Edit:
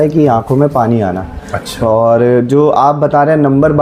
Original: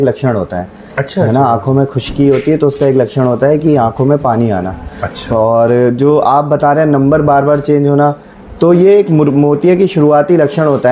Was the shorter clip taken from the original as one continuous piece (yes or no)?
yes